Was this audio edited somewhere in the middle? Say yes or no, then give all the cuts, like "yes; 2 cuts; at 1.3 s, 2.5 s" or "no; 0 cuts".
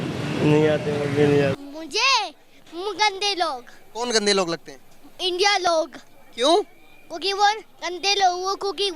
yes; 1 cut; at 1.6 s